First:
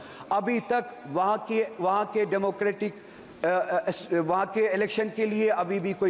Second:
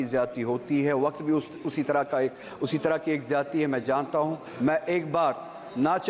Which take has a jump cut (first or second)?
second